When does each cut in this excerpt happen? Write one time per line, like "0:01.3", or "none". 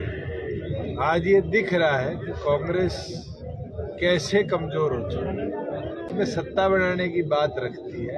0:06.1